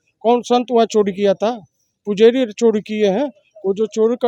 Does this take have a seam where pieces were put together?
no; 0 cuts

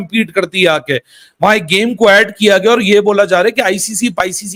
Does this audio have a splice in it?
no; 0 cuts

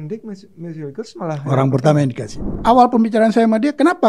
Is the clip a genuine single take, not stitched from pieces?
no; 1 cut; at 2.5 s

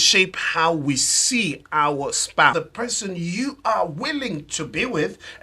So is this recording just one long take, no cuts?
no; 1 cut; at 2.5 s

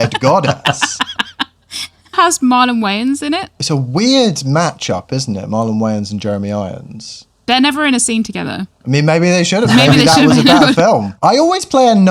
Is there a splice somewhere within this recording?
yes; 4 cuts; at 2.1 s, 3.5 s, 7.1 s, 11.1 s

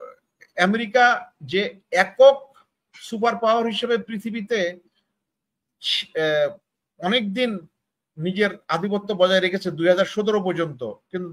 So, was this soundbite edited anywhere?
no; 0 cuts

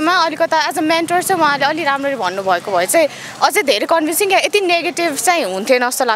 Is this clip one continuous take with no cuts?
yes; 0 cuts

